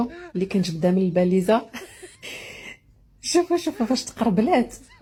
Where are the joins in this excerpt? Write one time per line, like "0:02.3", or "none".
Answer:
none